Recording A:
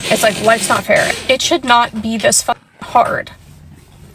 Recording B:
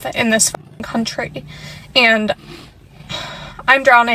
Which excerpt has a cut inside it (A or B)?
A